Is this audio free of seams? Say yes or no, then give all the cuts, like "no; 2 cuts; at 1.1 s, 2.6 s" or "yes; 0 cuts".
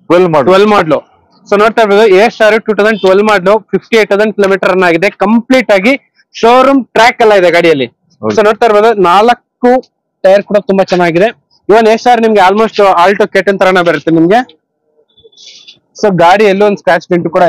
yes; 0 cuts